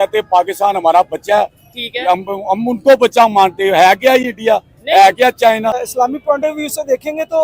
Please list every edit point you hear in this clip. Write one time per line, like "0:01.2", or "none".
0:05.8